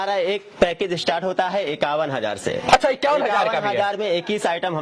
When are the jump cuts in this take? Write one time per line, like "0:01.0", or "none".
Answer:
none